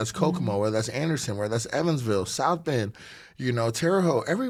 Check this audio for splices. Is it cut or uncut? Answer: uncut